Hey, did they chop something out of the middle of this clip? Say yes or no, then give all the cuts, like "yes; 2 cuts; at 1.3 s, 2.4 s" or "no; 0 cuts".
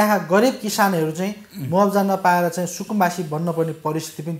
no; 0 cuts